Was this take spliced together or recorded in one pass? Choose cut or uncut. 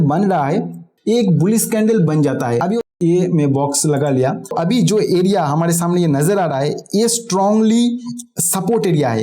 cut